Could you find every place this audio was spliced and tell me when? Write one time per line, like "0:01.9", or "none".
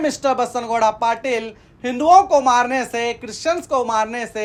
none

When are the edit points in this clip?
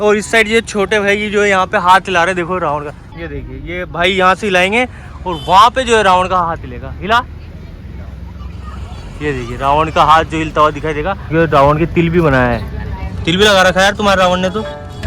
0:03.0
0:11.2

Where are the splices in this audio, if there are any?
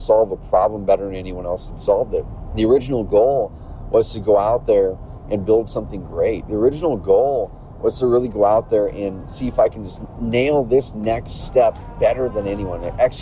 0:02.4
0:12.3

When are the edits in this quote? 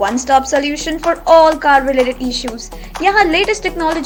none

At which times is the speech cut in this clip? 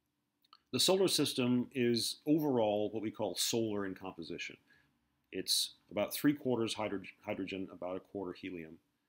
0:04.7

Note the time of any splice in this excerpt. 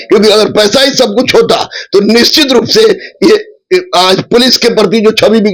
none

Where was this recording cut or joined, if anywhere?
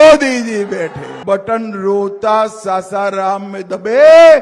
0:01.1

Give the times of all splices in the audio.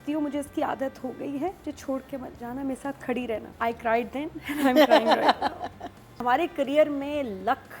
0:01.6
0:03.5
0:06.2

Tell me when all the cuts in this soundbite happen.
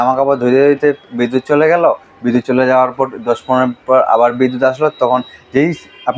none

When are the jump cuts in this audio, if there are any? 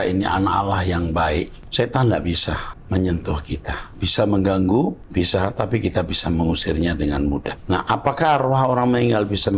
0:01.6
0:02.7
0:05.0
0:07.5

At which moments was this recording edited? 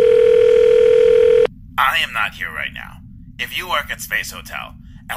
0:01.6

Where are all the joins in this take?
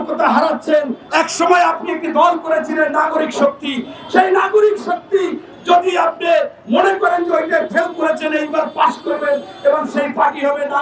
0:01.0

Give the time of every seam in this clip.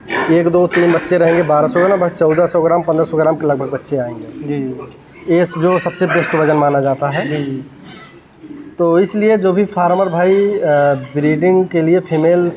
none

